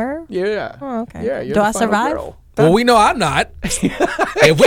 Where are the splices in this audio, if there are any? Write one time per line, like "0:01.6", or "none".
0:02.5

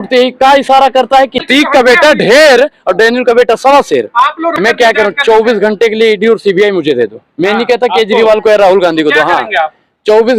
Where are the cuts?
0:01.5
0:04.6

